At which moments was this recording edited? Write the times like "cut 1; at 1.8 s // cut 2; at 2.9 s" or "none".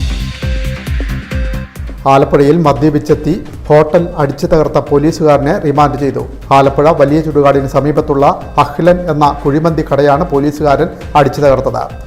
cut 1; at 1.7 s